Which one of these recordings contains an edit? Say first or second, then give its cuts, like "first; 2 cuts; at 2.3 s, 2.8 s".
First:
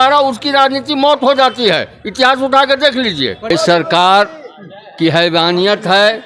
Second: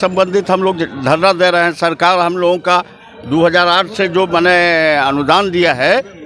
first; 1 cut; at 3.5 s